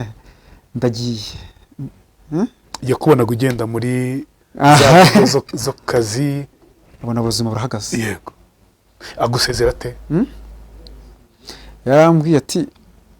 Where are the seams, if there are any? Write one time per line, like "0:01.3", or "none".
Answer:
0:06.5